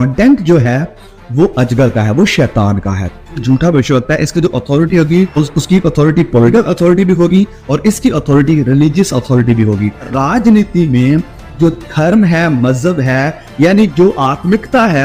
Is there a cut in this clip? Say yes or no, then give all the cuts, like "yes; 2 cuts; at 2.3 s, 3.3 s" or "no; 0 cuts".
yes; 4 cuts; at 3.4 s, 5.3 s, 6.5 s, 10.1 s